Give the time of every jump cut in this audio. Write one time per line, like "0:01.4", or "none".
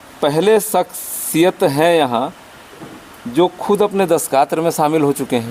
none